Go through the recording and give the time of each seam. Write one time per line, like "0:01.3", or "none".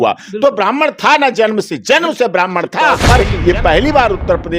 0:03.0